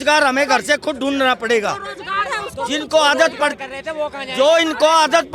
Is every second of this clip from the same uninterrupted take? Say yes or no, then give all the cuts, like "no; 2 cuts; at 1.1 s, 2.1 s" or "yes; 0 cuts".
yes; 0 cuts